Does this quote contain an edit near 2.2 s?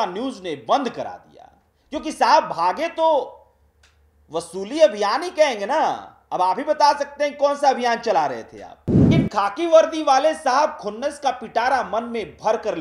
no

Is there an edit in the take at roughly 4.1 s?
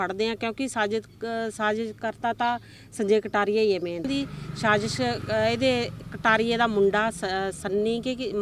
yes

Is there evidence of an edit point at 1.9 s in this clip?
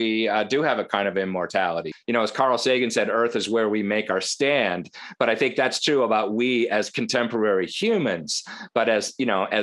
yes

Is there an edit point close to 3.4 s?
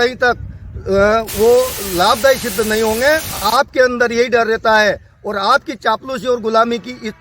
yes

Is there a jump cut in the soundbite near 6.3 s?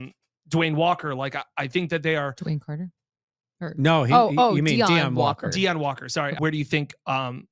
yes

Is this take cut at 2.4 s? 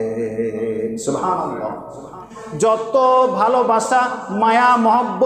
yes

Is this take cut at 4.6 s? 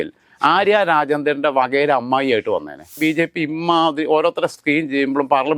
no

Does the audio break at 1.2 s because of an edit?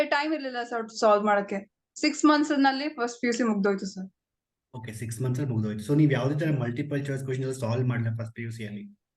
no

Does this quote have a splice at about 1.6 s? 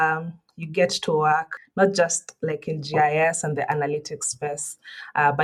yes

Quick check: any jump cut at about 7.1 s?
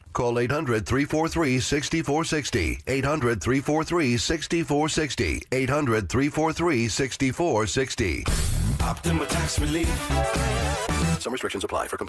yes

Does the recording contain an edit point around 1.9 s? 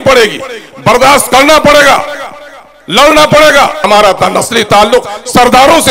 no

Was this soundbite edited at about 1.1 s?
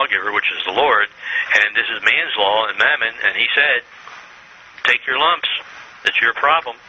yes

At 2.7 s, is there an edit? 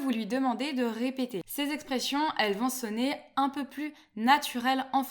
no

